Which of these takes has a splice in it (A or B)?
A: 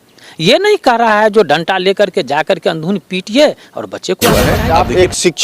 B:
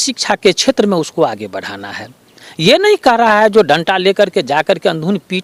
A